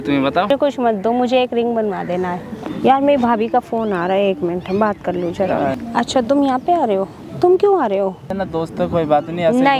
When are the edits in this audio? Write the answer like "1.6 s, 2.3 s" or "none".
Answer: 2.6 s, 5.7 s, 8.3 s